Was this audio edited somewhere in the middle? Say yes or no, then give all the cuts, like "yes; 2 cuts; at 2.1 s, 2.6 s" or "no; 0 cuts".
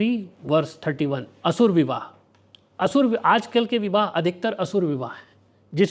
no; 0 cuts